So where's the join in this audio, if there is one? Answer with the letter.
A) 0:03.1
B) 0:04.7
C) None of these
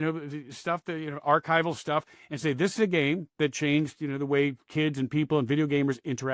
C